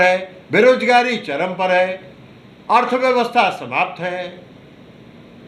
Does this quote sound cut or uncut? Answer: uncut